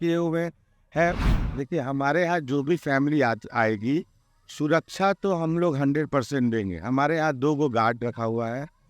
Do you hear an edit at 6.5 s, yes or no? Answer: no